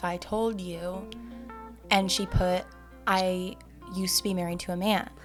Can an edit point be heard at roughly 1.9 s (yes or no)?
no